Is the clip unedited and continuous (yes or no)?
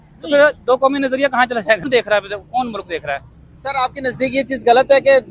no